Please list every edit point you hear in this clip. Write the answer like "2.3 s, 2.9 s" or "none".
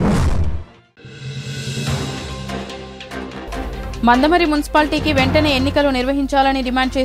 1.0 s, 3.9 s